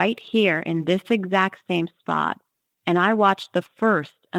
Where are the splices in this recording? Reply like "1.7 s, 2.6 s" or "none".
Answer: none